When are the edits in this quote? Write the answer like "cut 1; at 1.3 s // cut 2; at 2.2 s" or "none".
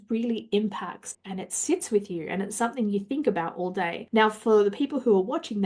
cut 1; at 1.1 s // cut 2; at 4.0 s